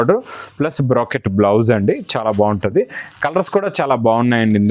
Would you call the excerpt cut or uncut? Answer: uncut